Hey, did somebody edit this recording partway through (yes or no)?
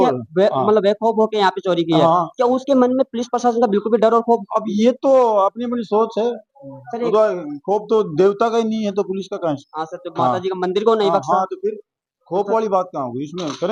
no